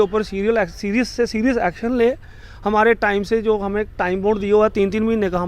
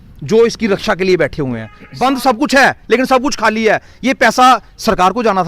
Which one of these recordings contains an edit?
second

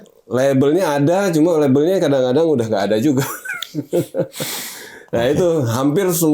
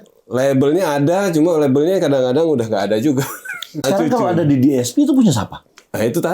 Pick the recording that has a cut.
second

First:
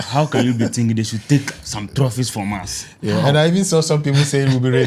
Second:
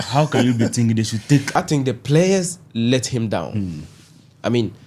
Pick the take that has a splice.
second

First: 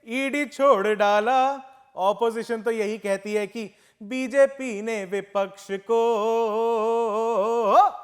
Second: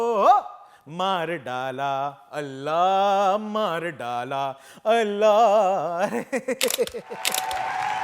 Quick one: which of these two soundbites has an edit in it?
second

